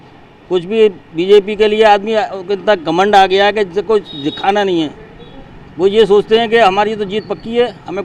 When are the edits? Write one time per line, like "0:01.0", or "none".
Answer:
none